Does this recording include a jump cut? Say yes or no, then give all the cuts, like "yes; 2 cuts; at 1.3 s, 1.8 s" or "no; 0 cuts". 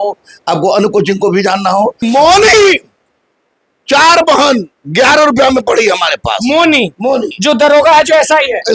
yes; 1 cut; at 2.0 s